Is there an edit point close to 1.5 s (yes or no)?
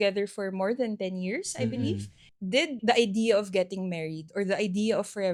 no